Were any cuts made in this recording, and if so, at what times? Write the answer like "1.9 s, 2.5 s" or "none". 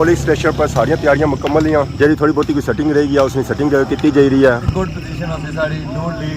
4.7 s